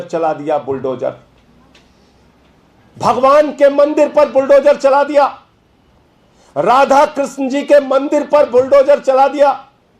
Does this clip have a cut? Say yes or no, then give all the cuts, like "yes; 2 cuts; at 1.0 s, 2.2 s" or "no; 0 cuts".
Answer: no; 0 cuts